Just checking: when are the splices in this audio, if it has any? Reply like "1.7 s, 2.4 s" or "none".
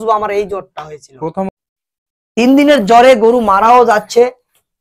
1.5 s